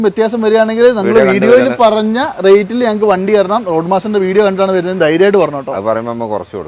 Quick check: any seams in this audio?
no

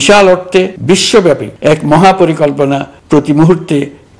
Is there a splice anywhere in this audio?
yes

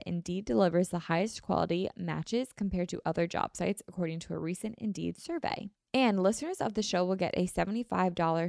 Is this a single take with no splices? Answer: no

